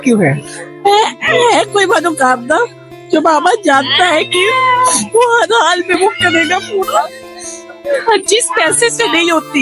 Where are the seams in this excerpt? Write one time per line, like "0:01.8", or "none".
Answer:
none